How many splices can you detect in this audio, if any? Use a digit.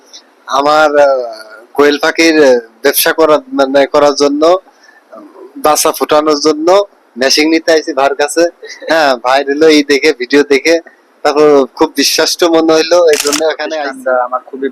1